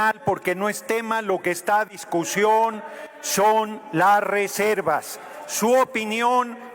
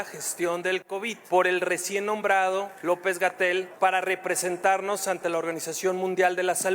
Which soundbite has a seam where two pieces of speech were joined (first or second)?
second